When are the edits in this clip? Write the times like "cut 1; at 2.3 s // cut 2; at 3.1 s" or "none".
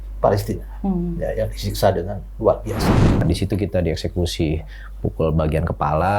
cut 1; at 3.2 s